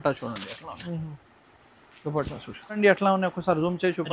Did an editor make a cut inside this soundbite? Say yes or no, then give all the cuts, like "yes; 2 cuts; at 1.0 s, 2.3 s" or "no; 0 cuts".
yes; 1 cut; at 2.8 s